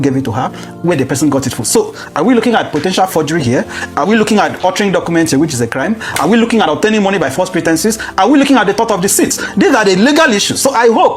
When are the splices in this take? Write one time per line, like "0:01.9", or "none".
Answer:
none